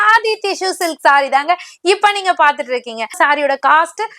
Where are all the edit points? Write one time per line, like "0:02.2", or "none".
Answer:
0:03.2